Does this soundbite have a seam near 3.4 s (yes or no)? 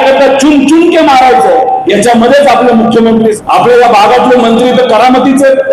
yes